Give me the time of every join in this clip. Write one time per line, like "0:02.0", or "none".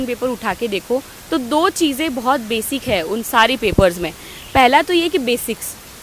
none